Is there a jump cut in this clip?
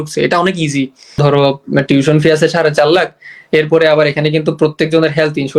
yes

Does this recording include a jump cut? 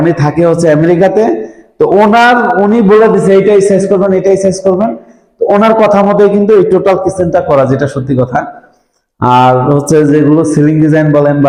no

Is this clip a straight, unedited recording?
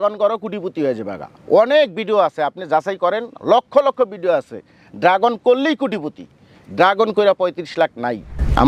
yes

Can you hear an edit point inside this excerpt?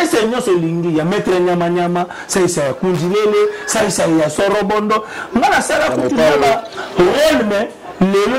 no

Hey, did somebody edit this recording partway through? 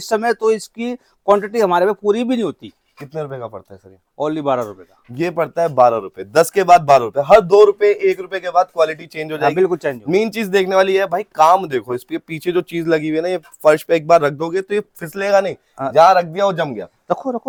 no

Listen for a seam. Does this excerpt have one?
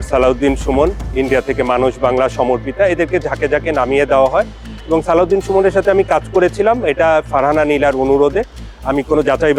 no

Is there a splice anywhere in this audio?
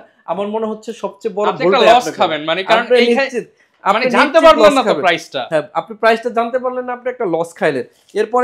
no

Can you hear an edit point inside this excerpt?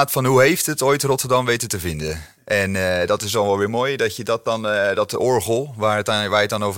no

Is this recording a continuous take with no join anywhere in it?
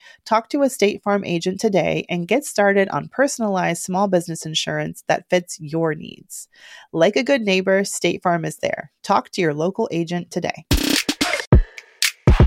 no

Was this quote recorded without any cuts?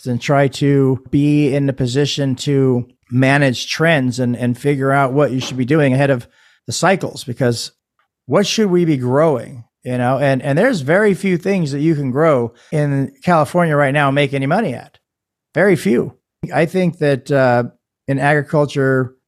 no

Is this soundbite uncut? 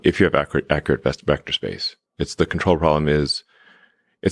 yes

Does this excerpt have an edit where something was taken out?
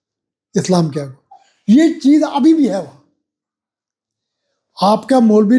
no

